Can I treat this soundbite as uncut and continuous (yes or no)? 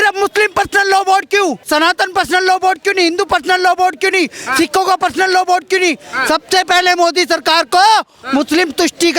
no